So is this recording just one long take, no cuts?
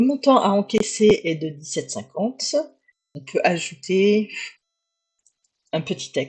no; 1 cut; at 3.1 s

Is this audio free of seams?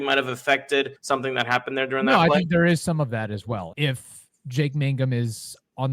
no; 2 cuts; at 1.0 s, 3.7 s

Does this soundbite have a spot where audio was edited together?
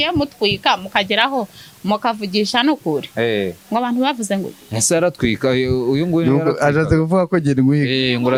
no; 0 cuts

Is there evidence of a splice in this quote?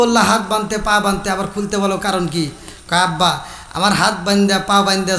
no; 0 cuts

